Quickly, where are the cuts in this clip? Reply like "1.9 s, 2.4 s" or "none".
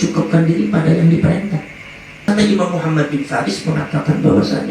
2.2 s